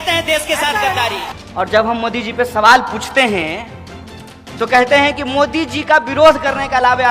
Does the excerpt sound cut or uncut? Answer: cut